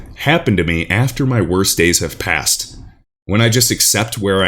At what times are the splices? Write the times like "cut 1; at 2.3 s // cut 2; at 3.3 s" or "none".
none